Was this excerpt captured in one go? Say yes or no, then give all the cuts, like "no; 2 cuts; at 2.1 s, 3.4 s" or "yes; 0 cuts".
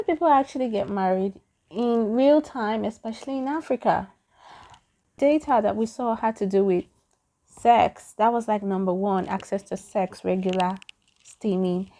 no; 1 cut; at 5.1 s